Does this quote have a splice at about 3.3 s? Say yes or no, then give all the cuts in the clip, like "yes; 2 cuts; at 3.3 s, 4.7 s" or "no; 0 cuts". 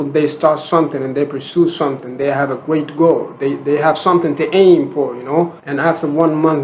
no; 1 cut; at 5.6 s